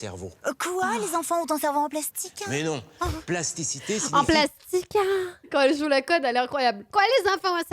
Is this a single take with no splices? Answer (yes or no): no